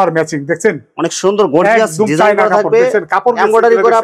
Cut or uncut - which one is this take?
uncut